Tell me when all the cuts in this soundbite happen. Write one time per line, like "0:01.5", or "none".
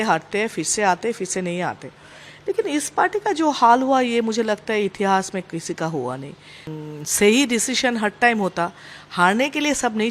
0:06.7